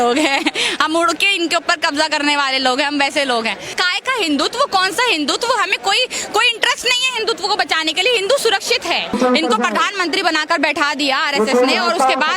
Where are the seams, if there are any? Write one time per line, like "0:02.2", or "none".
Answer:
0:03.8
0:09.1